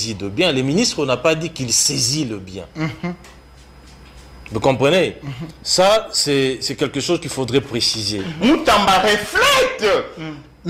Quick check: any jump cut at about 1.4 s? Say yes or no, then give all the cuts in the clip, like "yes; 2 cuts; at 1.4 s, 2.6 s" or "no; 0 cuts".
no; 1 cut; at 8.3 s